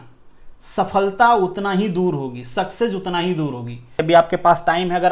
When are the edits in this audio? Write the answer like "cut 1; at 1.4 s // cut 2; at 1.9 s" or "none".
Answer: cut 1; at 4.0 s